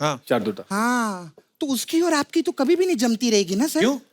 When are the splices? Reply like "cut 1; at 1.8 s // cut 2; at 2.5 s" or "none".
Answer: none

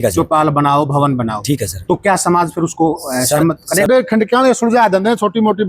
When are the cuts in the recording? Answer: cut 1; at 3.9 s

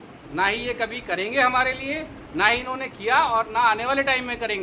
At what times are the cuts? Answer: none

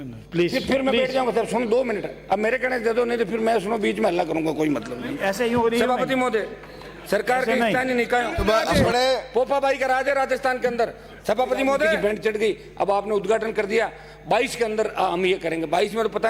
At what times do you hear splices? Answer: cut 1; at 8.8 s // cut 2; at 12.0 s

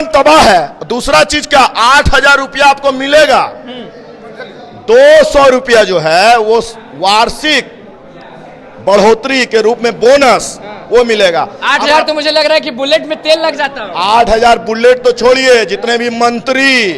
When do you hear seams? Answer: none

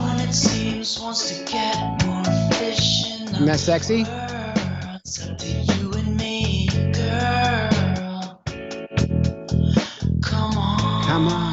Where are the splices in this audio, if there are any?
cut 1; at 4.6 s

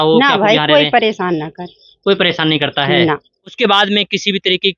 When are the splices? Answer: cut 1; at 3.6 s

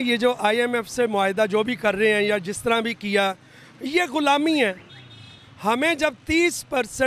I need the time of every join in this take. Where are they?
none

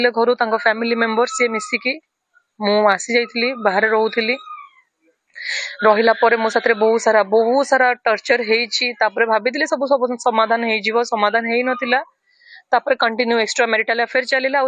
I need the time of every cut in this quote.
none

